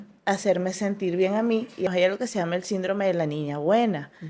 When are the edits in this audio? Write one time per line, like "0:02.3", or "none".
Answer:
0:01.9